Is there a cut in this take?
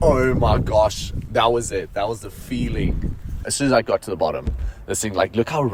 yes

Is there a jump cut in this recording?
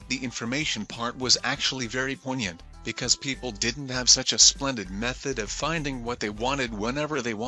no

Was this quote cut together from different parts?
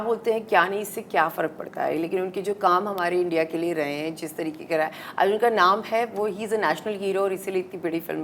no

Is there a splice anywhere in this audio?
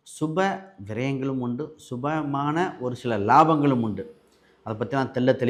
no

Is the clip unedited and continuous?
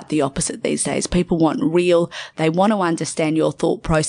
no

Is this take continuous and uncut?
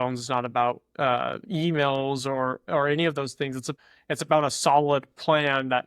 yes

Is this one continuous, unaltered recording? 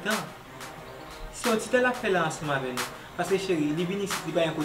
yes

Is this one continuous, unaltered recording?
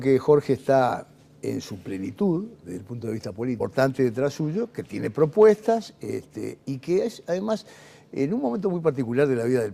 yes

